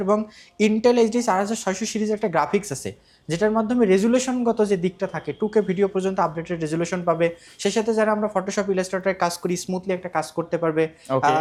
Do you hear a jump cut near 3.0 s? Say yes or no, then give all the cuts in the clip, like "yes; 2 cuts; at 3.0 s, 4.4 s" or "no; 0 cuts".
no; 0 cuts